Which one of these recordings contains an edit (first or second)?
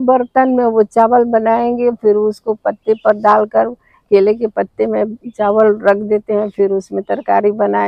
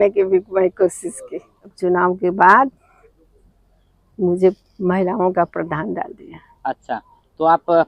second